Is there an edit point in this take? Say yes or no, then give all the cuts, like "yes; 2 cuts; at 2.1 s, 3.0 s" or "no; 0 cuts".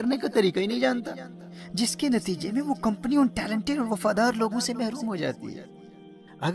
no; 0 cuts